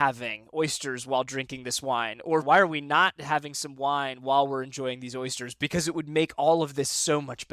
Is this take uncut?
no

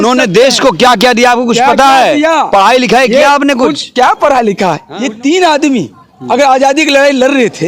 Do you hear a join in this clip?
yes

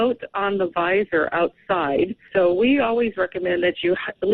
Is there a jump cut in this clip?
yes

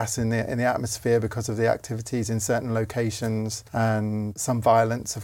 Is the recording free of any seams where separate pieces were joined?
no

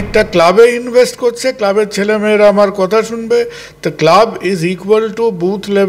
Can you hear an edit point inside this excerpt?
no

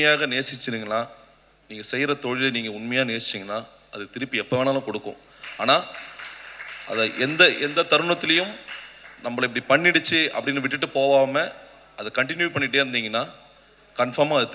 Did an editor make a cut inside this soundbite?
no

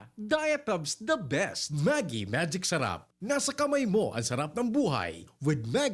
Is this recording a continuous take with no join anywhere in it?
no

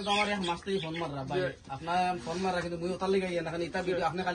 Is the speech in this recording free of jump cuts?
yes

